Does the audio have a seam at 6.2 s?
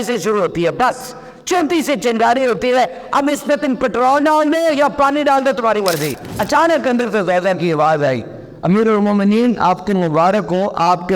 yes; 1 cut; at 6.2 s

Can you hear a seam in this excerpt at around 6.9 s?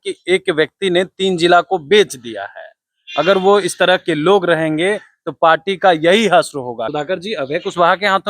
yes; 1 cut; at 6.9 s

